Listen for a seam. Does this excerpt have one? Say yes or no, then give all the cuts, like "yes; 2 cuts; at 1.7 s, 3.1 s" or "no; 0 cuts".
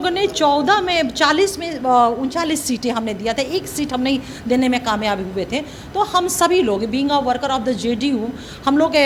no; 0 cuts